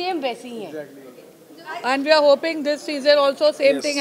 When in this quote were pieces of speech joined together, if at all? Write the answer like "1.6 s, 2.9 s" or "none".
1.8 s